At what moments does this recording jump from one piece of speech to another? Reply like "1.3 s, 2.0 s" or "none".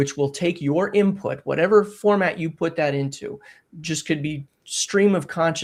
none